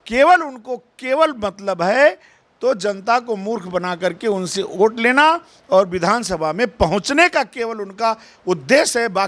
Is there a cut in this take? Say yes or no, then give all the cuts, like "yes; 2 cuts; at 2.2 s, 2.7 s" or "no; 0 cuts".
no; 0 cuts